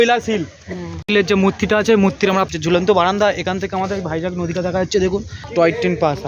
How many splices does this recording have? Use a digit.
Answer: 3